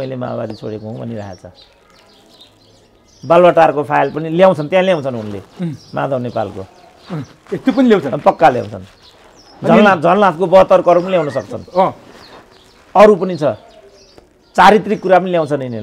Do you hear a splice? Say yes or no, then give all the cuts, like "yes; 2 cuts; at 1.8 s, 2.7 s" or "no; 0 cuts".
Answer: no; 0 cuts